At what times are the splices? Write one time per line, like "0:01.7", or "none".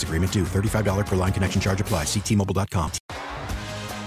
0:03.0